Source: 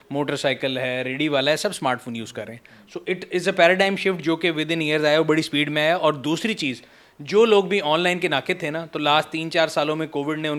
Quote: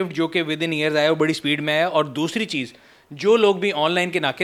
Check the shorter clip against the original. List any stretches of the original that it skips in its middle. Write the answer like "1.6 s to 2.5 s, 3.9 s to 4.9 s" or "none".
none